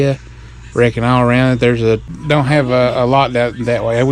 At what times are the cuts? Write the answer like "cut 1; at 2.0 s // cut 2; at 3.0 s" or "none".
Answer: cut 1; at 2.1 s